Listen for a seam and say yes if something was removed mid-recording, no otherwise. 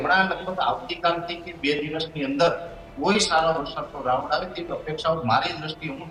no